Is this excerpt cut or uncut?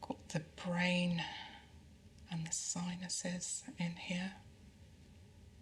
uncut